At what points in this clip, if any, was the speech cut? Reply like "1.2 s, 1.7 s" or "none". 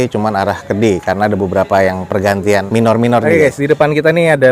3.3 s